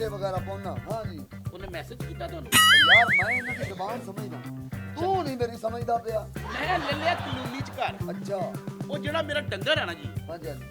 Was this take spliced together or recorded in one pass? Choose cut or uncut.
uncut